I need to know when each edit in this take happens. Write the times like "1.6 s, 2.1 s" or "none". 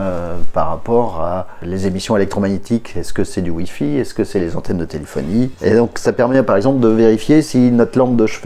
1.6 s, 5.5 s